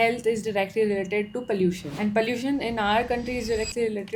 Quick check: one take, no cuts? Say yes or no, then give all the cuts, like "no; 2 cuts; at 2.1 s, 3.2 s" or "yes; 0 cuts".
yes; 0 cuts